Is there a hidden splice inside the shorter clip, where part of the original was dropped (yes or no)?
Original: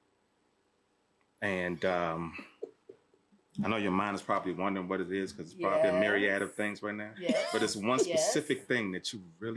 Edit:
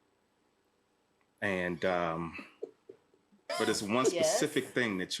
yes